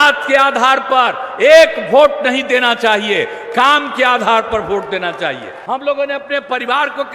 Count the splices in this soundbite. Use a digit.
1